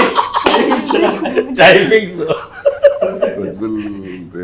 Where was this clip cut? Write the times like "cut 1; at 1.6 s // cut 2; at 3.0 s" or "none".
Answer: none